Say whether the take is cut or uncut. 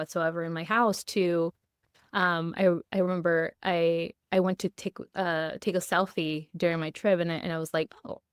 uncut